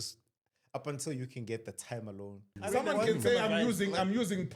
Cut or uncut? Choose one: cut